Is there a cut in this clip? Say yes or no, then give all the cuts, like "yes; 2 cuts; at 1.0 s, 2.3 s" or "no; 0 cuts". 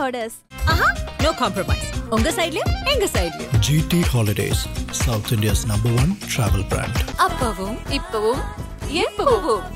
no; 0 cuts